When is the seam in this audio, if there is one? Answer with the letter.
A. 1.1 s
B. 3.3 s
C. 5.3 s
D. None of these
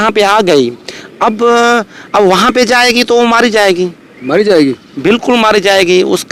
D